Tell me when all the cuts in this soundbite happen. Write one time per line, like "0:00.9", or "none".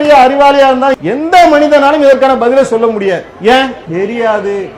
0:01.0
0:03.8